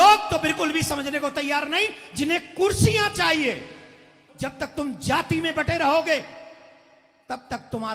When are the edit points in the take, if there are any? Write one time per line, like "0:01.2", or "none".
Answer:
0:04.2